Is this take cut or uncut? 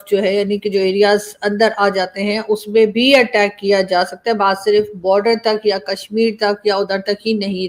uncut